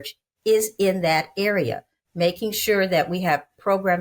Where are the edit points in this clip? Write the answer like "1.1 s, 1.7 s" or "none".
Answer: none